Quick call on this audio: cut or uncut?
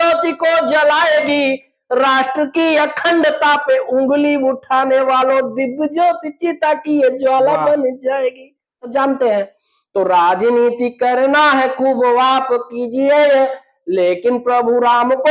cut